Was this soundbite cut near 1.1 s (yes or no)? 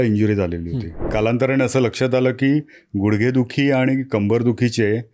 yes